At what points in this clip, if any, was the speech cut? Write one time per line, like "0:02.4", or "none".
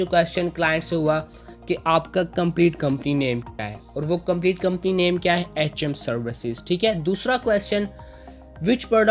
none